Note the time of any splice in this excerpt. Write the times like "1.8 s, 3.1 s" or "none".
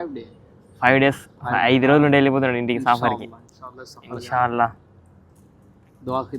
none